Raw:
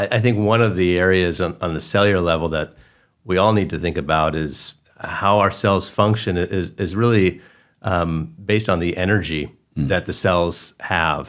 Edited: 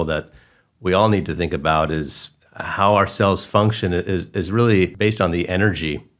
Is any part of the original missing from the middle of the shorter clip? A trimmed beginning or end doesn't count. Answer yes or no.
yes